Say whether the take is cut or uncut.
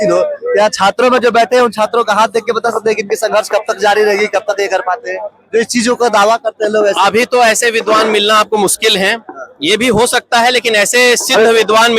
uncut